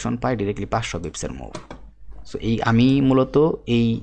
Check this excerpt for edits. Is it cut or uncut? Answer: uncut